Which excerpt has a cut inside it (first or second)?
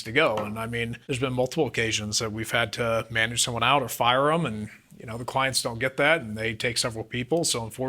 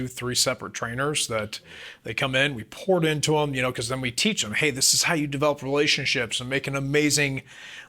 first